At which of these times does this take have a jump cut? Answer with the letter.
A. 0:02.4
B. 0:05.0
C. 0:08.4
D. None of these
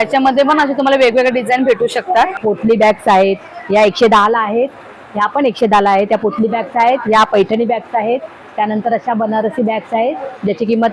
A